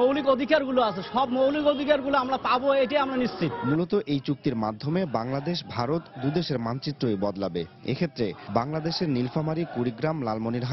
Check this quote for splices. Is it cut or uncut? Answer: uncut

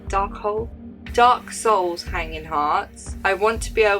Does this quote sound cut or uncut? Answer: cut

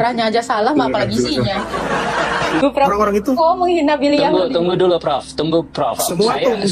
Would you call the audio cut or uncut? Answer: cut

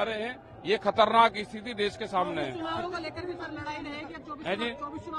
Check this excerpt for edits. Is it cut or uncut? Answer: uncut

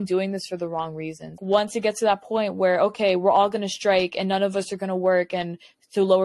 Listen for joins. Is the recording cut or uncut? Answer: cut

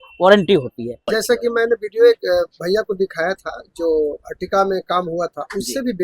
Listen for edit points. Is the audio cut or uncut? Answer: cut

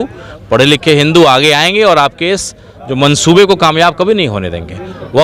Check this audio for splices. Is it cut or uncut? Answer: uncut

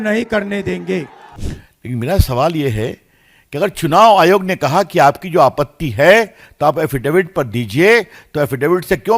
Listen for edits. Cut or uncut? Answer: cut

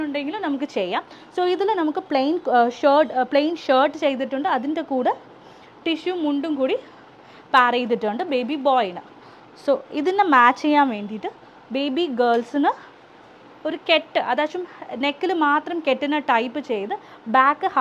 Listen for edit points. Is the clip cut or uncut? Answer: uncut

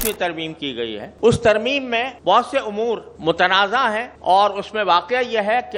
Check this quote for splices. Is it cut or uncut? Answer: cut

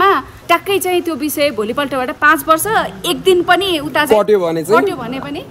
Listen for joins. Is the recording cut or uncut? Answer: cut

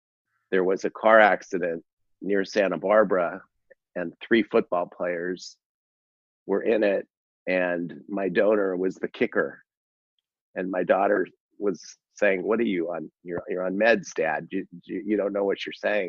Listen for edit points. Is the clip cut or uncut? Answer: uncut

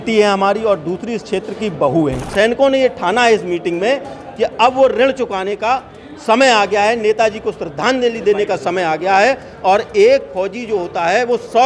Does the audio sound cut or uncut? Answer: cut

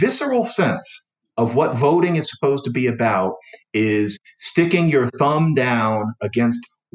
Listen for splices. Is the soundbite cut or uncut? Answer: uncut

